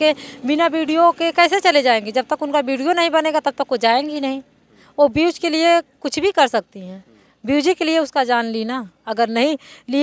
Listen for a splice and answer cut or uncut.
uncut